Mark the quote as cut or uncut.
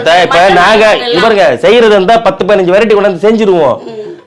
uncut